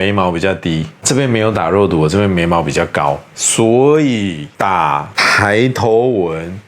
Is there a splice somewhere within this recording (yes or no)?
yes